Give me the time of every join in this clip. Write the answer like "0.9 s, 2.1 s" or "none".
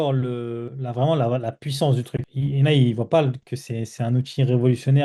none